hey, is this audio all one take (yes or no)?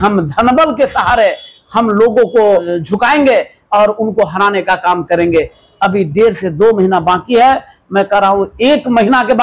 no